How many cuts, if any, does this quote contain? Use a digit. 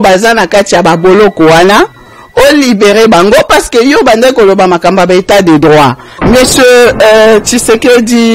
1